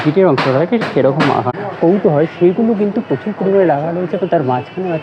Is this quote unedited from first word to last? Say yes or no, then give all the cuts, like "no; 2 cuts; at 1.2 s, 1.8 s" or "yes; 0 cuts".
no; 1 cut; at 1.5 s